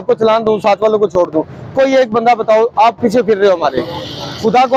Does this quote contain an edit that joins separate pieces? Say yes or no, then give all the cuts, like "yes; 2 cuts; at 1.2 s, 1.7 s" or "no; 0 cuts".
no; 0 cuts